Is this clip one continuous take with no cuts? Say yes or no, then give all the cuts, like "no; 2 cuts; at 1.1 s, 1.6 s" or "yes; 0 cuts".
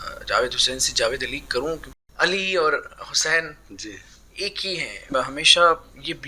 no; 2 cuts; at 2.0 s, 5.1 s